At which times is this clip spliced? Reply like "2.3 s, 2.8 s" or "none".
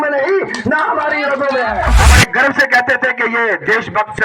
1.9 s